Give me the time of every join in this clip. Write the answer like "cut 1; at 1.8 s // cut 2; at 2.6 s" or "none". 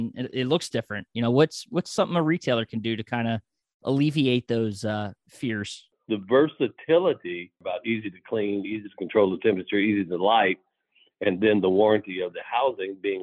cut 1; at 6.0 s // cut 2; at 7.6 s